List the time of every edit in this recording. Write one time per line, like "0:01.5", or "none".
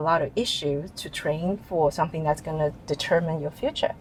none